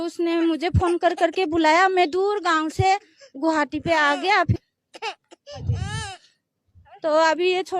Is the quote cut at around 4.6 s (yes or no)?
yes